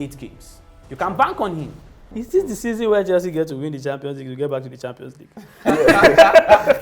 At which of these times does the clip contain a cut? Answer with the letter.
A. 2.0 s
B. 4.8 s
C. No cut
A